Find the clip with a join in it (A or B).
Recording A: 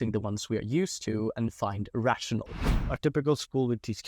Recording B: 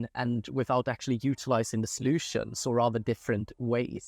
A